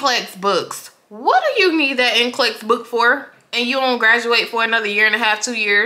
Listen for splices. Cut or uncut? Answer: uncut